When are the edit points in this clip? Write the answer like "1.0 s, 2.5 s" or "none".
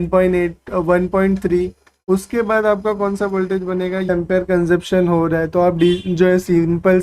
4.1 s